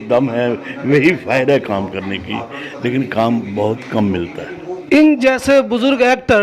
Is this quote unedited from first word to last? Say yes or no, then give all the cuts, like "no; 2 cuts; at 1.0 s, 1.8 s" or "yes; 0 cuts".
yes; 0 cuts